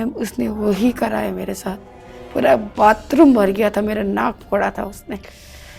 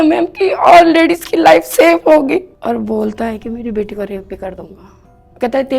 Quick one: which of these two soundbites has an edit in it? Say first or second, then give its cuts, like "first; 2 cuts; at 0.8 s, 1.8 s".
second; 1 cut; at 2.6 s